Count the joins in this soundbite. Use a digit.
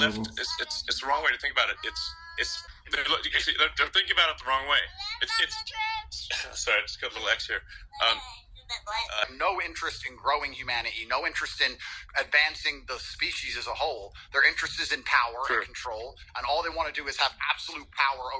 2